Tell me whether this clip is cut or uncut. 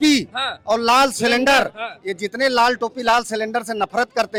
uncut